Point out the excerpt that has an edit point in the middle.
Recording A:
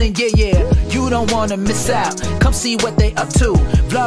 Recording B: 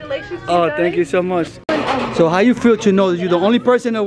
B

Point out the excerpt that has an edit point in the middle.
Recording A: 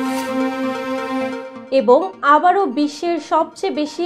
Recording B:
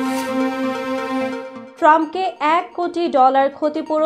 B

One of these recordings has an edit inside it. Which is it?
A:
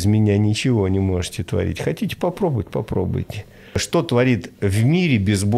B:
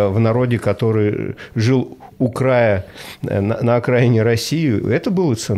A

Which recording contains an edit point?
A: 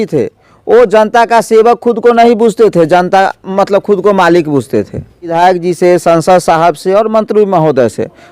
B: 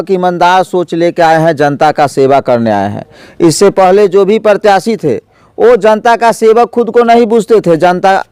A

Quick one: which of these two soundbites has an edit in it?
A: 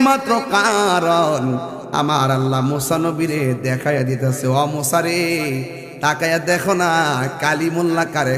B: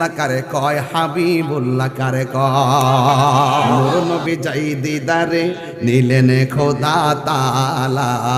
B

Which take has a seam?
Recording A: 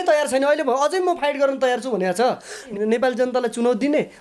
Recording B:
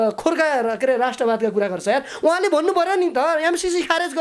A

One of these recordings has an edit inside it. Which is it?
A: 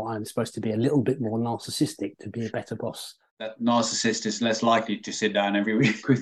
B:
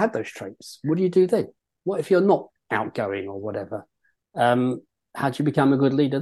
A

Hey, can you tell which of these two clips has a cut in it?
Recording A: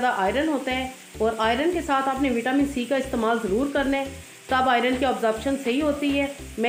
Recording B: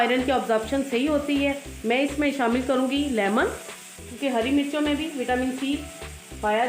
B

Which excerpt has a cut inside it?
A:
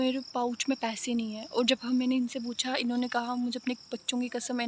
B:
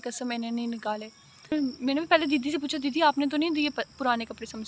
B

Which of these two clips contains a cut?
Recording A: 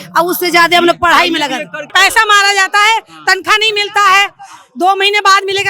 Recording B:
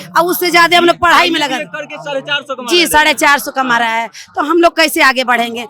A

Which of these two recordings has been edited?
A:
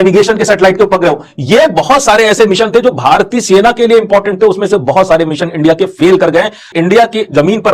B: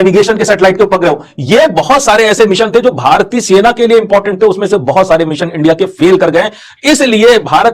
A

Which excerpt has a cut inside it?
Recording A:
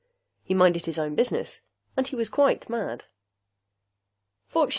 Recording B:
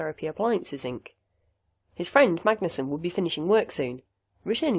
A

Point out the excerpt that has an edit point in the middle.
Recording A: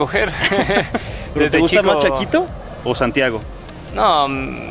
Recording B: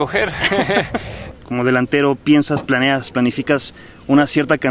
B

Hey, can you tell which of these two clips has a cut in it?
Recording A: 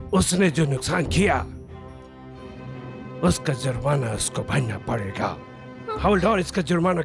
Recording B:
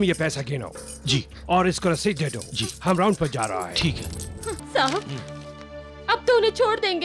B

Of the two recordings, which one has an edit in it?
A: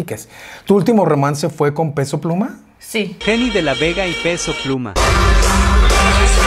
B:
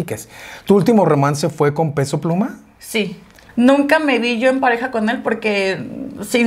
B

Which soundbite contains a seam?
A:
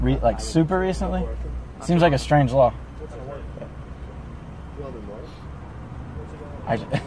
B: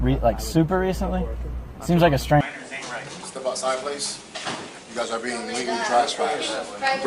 B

